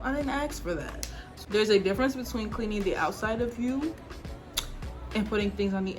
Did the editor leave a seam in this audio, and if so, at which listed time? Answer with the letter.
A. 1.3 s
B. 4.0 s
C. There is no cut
A